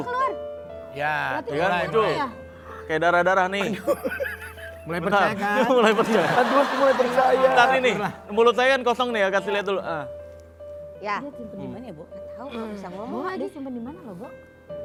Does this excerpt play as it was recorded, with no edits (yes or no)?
yes